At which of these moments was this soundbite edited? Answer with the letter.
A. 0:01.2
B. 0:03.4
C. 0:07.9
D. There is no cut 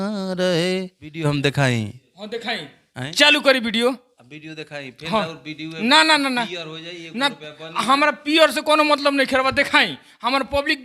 A